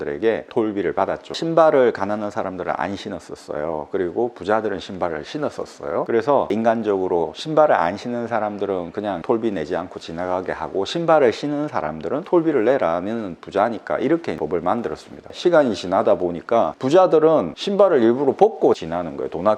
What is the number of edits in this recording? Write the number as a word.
two